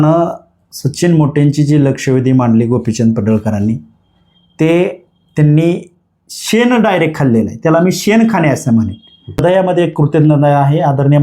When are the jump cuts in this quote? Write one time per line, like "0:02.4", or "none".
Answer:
0:09.4